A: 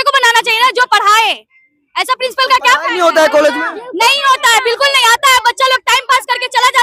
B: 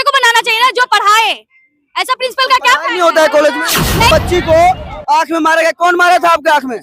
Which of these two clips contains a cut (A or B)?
B